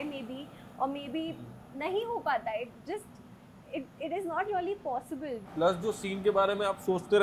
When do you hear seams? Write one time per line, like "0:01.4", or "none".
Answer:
0:05.4